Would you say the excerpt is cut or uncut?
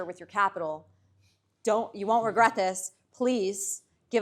uncut